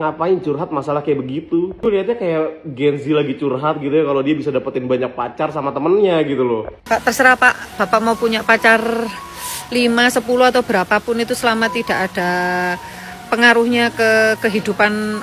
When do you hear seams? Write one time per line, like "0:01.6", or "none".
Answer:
0:06.8